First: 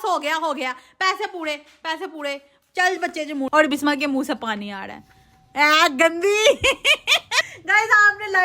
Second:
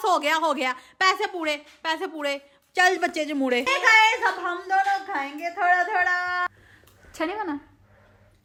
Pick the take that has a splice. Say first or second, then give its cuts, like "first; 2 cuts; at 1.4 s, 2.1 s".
first; 2 cuts; at 3.5 s, 7.5 s